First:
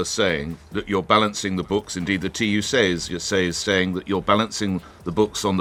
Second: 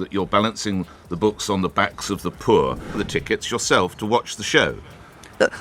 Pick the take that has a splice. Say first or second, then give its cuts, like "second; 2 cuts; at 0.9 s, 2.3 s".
second; 1 cut; at 2.8 s